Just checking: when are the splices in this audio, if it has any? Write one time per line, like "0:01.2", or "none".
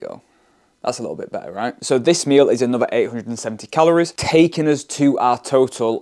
0:01.8
0:04.2